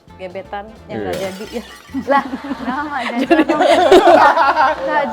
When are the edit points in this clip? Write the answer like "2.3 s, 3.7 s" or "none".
none